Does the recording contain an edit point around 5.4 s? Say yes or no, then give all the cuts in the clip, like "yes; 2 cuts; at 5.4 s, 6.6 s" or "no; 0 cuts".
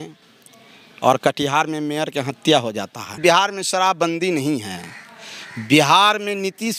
no; 1 cut; at 3.2 s